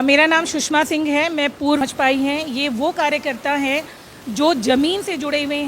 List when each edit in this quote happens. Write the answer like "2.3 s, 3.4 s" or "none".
1.8 s